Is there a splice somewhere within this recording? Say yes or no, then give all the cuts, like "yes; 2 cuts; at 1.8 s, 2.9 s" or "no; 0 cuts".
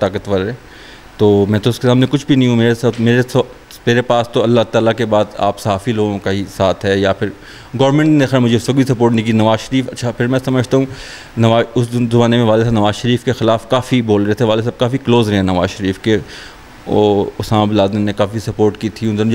no; 0 cuts